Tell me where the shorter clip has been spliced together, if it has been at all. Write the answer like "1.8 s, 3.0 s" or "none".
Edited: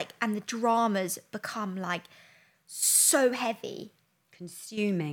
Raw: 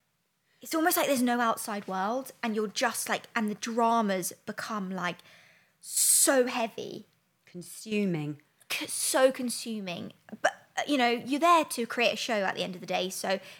none